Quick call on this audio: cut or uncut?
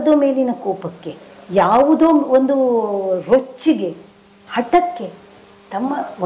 uncut